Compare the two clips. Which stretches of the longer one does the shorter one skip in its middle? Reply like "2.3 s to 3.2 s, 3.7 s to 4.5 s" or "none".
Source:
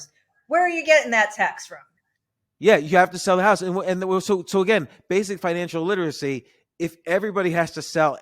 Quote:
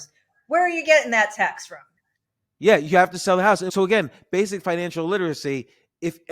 3.7 s to 4.4 s